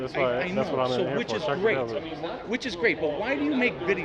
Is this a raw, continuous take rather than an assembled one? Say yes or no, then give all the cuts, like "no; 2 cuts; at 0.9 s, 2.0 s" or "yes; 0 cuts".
yes; 0 cuts